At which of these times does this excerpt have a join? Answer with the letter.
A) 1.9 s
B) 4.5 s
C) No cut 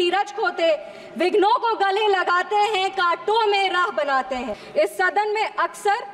B